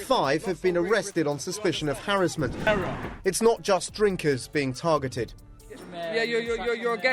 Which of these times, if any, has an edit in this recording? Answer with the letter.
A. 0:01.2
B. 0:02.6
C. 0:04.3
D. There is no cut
B